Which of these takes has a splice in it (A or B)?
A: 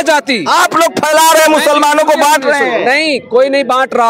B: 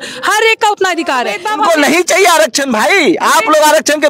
B